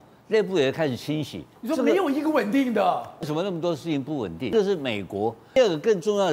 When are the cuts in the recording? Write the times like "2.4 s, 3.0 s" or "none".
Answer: 1.6 s, 3.2 s, 4.5 s, 5.6 s